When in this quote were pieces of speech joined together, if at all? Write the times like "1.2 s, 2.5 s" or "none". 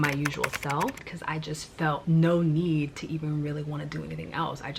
1.0 s